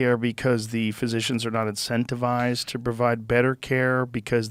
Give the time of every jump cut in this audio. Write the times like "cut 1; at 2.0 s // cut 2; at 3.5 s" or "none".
none